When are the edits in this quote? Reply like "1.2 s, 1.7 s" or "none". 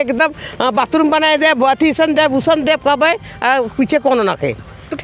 none